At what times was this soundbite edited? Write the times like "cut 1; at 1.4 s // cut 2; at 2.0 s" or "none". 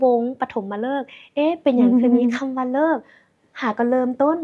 none